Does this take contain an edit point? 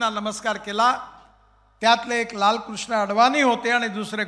no; 0 cuts

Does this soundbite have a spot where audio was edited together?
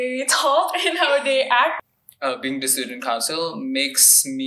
yes; 1 cut; at 1.9 s

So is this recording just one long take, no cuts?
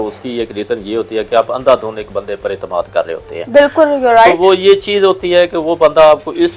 yes; 0 cuts

